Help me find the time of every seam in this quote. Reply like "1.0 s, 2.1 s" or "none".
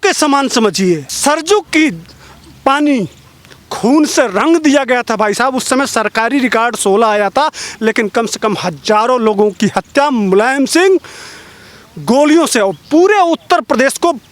1.1 s